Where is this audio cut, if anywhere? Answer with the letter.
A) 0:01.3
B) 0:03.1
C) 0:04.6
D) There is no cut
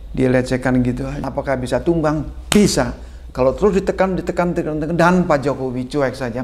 A